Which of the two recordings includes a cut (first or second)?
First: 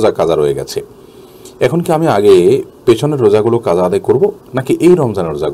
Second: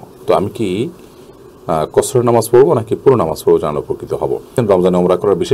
second